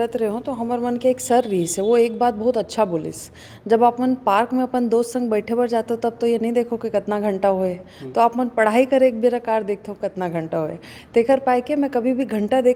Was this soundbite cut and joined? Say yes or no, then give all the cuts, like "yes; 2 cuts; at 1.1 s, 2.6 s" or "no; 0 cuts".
no; 0 cuts